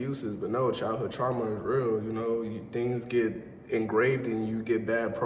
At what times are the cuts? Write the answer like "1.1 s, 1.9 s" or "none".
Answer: none